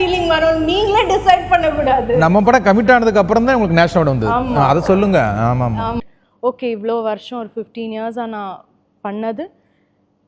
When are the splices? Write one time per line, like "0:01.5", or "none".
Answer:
0:06.0